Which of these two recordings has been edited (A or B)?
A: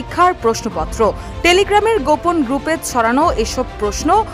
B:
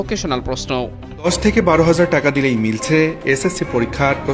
B